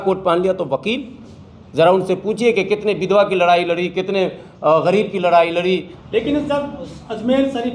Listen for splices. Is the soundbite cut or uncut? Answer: cut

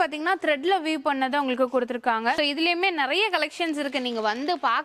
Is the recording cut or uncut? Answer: uncut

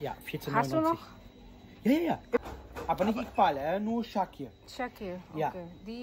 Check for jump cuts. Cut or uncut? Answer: cut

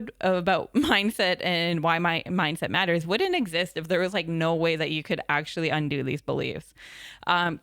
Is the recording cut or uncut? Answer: uncut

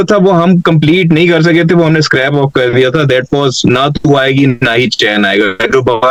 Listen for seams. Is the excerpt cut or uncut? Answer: uncut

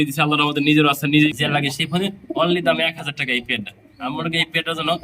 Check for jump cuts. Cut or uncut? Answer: cut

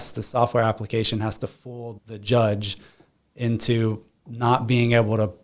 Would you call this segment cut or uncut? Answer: uncut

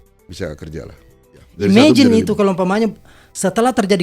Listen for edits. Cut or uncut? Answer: cut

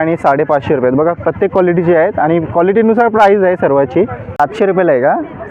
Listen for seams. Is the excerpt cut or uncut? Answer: cut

